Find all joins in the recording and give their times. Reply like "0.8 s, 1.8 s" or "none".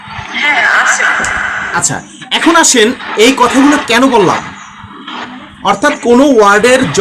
1.6 s